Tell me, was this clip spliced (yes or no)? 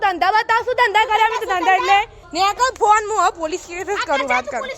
yes